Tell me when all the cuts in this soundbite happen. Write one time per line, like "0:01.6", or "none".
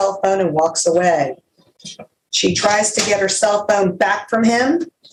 none